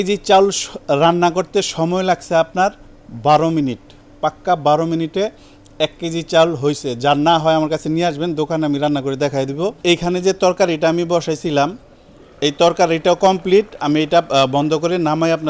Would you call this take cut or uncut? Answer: uncut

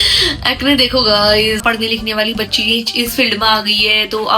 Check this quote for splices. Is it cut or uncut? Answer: cut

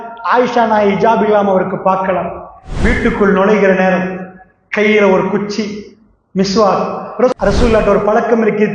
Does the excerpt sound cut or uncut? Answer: cut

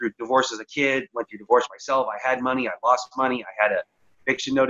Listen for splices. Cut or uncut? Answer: uncut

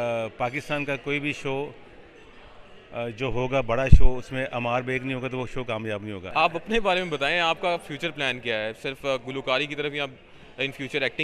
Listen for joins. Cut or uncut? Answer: cut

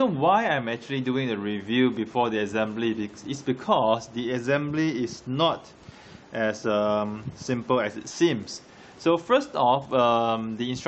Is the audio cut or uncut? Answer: uncut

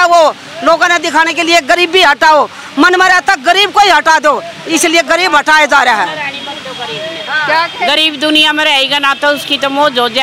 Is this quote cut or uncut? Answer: uncut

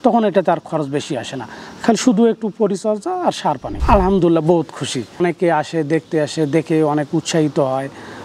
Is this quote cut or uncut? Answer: cut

